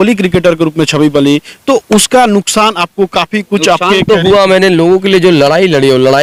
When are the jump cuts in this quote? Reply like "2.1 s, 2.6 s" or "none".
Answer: none